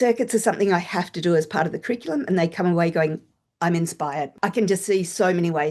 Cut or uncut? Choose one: cut